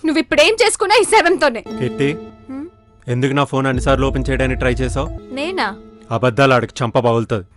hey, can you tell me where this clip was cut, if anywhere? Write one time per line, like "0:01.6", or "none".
0:01.7
0:02.3
0:05.2